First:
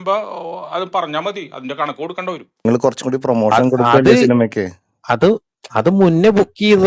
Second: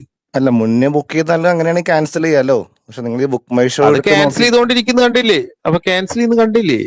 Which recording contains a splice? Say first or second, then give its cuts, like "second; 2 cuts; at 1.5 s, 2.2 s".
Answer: first; 1 cut; at 2.6 s